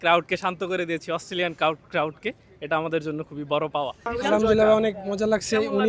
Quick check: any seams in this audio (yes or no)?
yes